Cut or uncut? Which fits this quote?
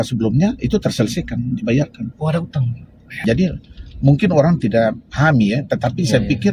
cut